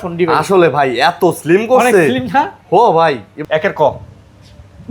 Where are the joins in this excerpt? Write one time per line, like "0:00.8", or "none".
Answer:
0:03.4